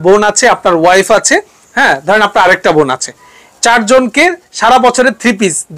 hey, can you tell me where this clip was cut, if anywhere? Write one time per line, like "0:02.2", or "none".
none

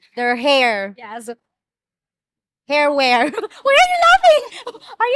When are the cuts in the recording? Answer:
none

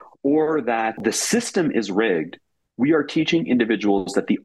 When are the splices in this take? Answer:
0:01.0

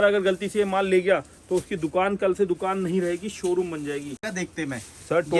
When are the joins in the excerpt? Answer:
0:04.3

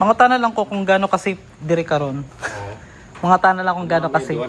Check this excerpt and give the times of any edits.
none

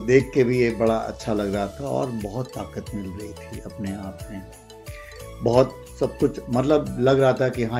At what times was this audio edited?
none

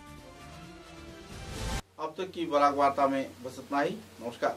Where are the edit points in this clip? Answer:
none

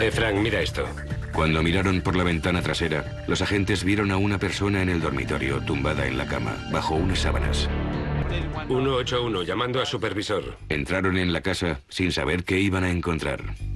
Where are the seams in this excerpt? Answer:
none

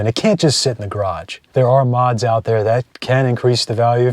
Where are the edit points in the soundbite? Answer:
0:01.4
0:02.9

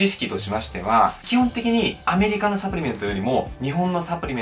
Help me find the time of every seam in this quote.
none

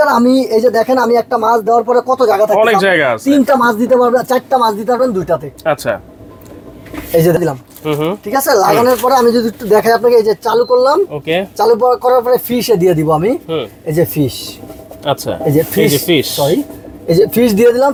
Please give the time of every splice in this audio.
none

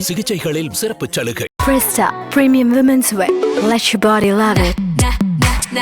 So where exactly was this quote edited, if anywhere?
0:01.5

